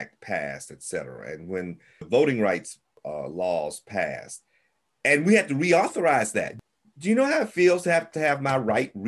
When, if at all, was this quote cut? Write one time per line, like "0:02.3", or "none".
0:02.1
0:03.0
0:06.5
0:08.1